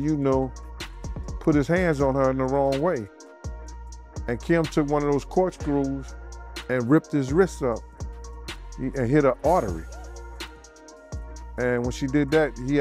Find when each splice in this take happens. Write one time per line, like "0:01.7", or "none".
none